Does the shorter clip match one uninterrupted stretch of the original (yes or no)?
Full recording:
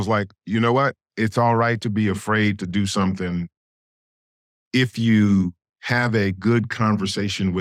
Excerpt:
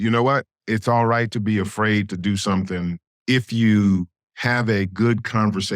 no